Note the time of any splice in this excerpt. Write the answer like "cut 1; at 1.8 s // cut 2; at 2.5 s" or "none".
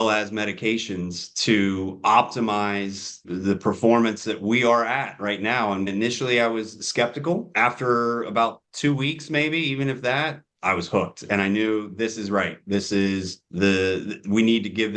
cut 1; at 5.9 s // cut 2; at 7.5 s